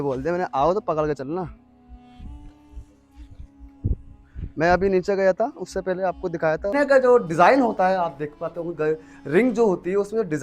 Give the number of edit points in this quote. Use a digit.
1